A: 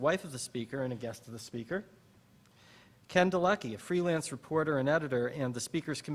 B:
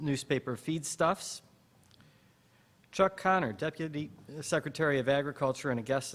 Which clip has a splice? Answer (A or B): B